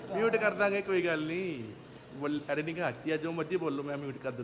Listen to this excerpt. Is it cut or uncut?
uncut